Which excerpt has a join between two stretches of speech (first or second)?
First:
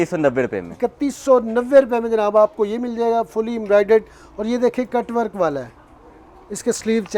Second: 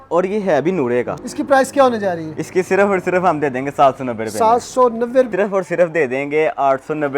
second